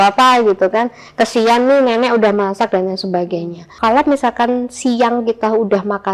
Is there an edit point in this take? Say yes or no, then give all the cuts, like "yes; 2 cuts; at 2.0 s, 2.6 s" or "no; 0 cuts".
yes; 1 cut; at 3.8 s